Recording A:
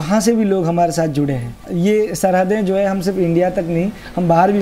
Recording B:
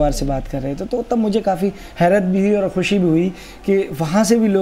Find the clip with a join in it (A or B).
A